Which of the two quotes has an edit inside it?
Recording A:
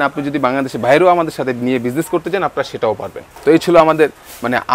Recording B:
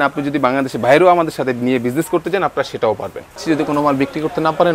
B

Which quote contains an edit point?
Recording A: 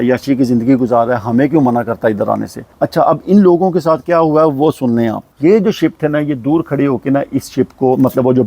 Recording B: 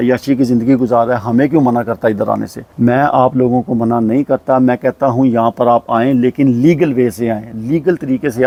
A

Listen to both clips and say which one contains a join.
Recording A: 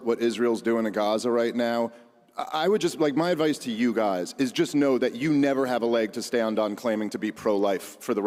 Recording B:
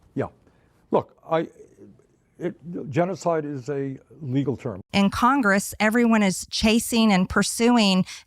B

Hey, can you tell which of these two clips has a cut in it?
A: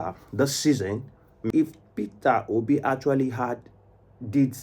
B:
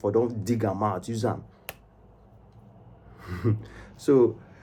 A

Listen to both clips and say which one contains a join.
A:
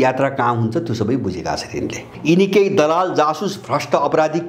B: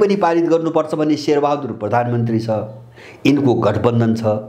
A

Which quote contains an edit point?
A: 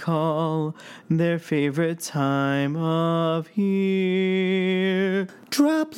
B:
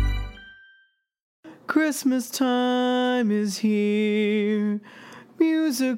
B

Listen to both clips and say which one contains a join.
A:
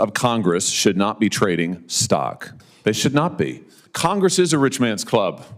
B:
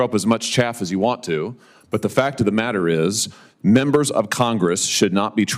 A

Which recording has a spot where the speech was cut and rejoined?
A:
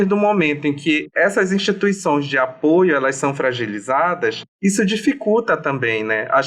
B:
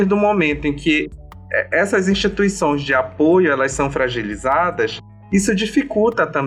A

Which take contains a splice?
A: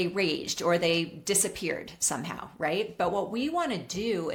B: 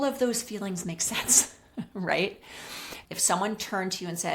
B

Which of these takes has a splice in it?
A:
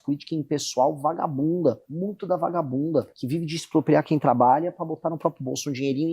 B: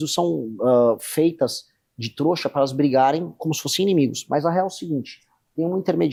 A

